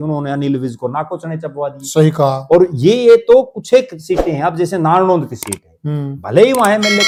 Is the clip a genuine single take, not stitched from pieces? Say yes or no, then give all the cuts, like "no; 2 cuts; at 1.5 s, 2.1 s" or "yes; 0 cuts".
yes; 0 cuts